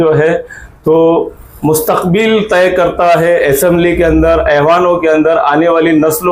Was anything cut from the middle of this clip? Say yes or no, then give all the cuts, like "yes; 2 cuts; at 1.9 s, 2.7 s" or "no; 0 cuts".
no; 0 cuts